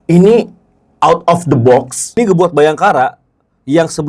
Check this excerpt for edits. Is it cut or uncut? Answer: cut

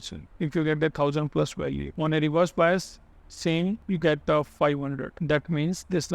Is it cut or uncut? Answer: cut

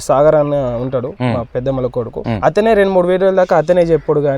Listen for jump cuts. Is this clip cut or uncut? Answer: cut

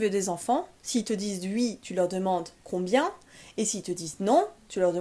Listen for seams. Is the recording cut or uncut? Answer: uncut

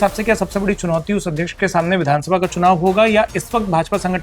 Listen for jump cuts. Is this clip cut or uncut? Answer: uncut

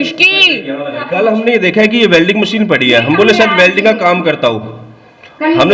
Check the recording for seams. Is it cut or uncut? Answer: cut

